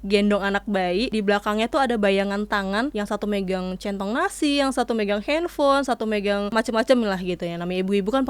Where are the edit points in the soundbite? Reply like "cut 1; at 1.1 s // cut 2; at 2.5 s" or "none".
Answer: cut 1; at 1.1 s // cut 2; at 2.9 s // cut 3; at 6.5 s